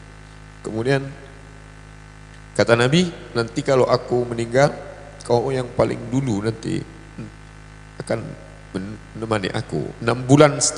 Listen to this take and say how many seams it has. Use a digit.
0